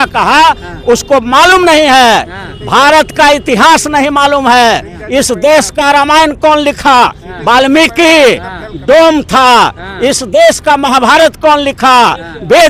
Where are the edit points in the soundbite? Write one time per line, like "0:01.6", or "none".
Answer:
none